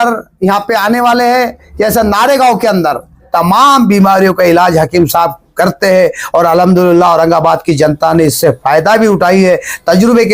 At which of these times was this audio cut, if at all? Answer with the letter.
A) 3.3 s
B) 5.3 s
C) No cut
A